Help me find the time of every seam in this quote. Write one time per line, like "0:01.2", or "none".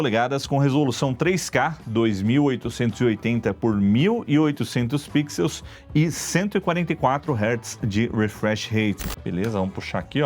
0:09.1